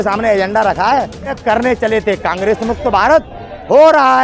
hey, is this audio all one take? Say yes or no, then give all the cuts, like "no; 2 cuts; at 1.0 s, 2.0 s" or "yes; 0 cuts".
no; 1 cut; at 1.4 s